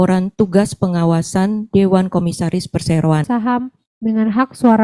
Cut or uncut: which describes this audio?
cut